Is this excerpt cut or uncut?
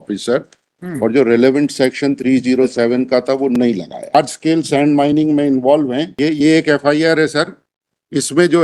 cut